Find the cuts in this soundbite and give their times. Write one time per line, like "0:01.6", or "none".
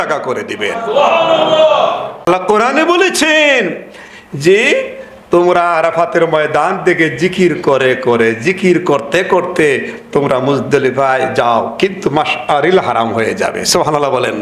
0:02.3

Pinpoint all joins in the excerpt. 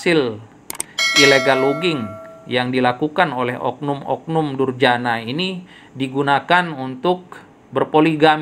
none

